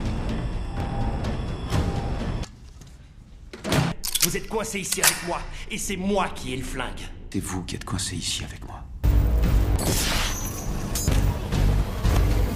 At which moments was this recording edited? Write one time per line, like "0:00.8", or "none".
none